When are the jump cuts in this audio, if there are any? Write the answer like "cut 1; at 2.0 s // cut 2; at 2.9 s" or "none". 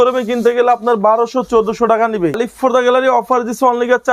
cut 1; at 2.4 s